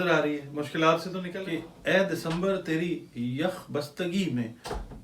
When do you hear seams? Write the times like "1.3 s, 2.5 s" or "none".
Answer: 1.3 s